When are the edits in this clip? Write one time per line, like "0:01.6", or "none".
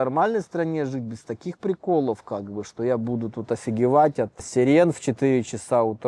none